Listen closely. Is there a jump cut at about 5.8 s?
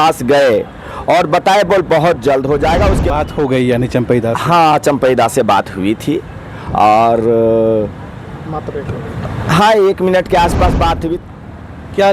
no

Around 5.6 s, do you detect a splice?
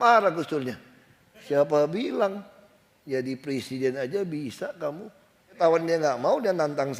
yes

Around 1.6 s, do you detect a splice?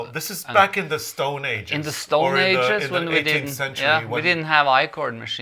no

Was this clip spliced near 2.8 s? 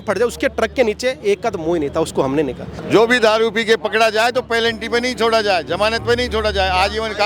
yes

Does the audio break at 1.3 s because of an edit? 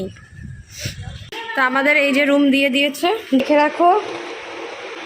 no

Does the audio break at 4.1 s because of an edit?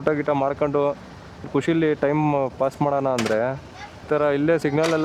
yes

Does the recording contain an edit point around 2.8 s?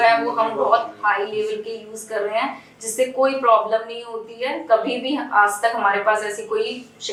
no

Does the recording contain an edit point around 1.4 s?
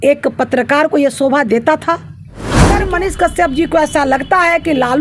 no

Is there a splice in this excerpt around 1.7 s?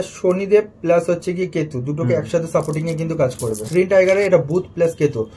no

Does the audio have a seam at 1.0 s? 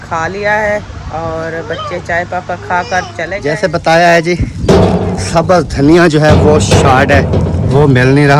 no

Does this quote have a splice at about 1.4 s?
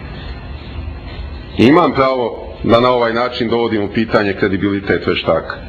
no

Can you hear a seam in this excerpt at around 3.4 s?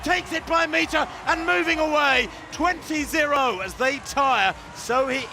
yes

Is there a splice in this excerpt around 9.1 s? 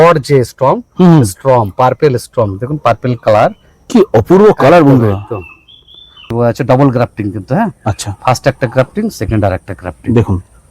no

